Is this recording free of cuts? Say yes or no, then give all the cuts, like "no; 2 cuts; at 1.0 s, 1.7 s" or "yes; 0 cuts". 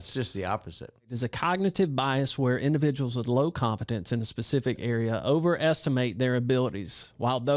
no; 1 cut; at 1.2 s